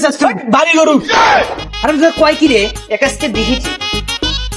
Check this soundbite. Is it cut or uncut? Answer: uncut